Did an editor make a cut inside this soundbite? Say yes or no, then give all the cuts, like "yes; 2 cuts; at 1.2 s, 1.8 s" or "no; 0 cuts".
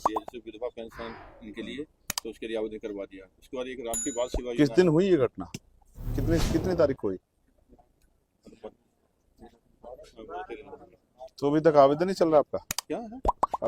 no; 0 cuts